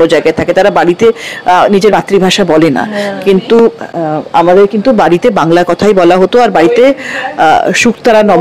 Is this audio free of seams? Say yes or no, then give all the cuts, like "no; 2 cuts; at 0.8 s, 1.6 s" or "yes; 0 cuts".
yes; 0 cuts